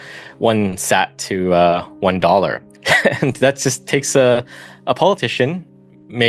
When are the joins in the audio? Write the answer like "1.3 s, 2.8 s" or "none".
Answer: 2.7 s